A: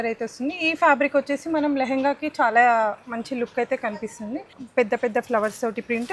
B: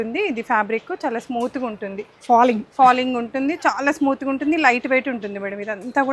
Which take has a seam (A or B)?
A